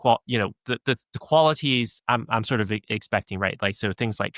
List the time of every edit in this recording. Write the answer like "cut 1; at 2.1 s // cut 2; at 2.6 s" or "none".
cut 1; at 1.9 s

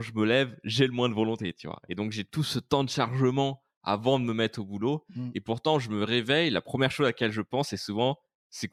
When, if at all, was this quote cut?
none

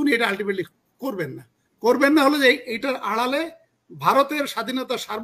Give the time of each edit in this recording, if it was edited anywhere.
none

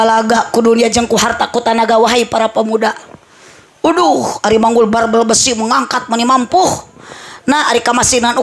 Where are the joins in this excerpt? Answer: none

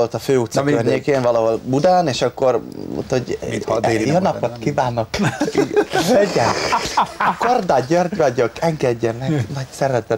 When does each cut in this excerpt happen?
cut 1; at 4.6 s

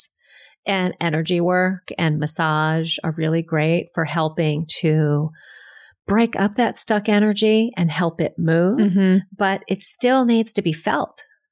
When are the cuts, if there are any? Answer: none

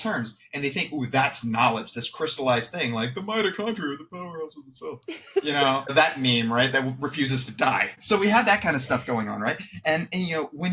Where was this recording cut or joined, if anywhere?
cut 1; at 5.9 s // cut 2; at 7.9 s

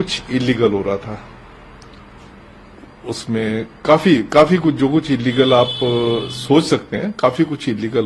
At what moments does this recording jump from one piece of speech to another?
none

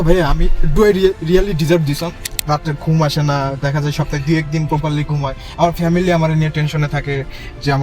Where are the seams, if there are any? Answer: cut 1; at 2.3 s

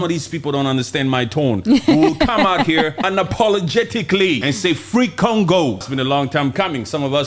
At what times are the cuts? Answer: cut 1; at 3.0 s // cut 2; at 4.4 s // cut 3; at 5.9 s

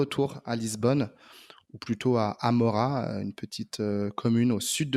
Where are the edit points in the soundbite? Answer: none

